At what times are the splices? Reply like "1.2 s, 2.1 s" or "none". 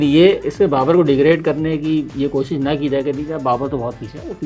none